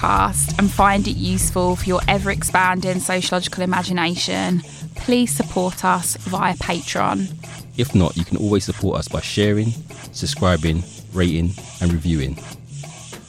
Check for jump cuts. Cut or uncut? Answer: uncut